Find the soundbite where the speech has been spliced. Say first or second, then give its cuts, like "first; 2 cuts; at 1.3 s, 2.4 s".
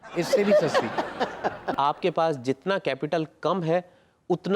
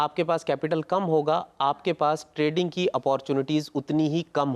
first; 1 cut; at 1.6 s